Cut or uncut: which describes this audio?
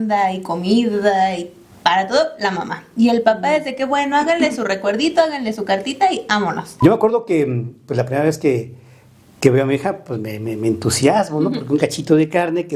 cut